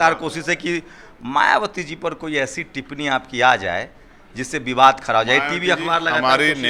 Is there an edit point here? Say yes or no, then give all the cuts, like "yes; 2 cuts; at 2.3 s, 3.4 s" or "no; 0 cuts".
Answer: no; 0 cuts